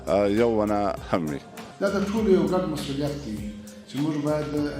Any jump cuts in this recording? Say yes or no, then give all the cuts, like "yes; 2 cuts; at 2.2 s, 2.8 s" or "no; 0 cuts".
yes; 1 cut; at 1.6 s